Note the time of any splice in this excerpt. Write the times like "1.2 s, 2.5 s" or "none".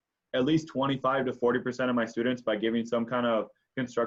none

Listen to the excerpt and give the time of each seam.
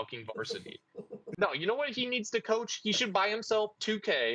1.4 s

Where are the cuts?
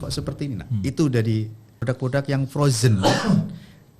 1.8 s

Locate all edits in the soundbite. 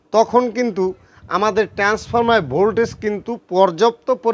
none

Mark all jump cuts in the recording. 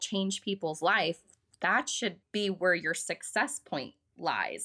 none

